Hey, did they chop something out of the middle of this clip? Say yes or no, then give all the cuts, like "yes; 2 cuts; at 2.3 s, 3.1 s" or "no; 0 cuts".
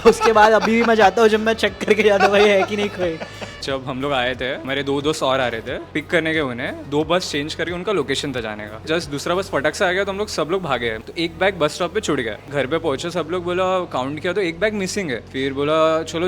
yes; 8 cuts; at 3.6 s, 4.6 s, 5.9 s, 6.8 s, 8.9 s, 11.0 s, 12.5 s, 15.2 s